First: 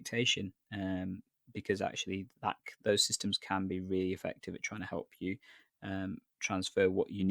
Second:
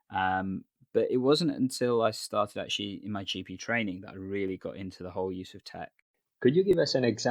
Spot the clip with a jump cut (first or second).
second